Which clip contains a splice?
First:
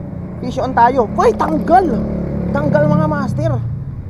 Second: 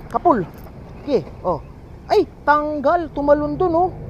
second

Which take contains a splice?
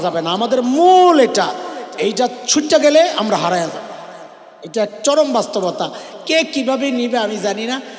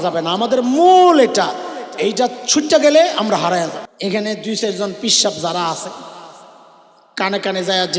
second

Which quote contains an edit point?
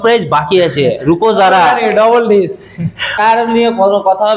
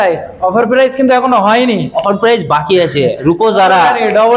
first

